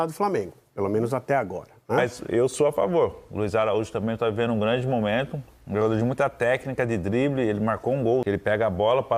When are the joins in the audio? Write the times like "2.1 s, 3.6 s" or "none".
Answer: 2.0 s, 8.2 s